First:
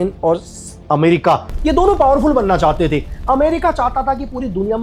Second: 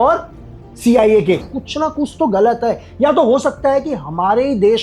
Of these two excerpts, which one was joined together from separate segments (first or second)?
second